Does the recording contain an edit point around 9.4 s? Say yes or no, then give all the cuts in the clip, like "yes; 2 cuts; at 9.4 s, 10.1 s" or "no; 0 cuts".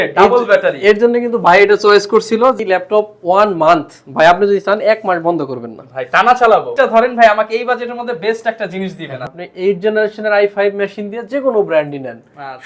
yes; 3 cuts; at 2.6 s, 6.7 s, 9.4 s